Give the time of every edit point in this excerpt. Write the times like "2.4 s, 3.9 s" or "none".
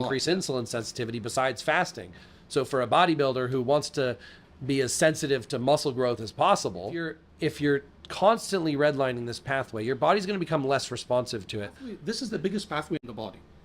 7.2 s, 11.9 s